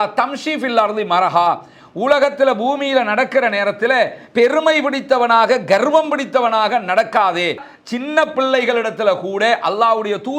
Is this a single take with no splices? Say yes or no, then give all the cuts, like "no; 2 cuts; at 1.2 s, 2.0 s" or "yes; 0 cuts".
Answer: no; 1 cut; at 7.7 s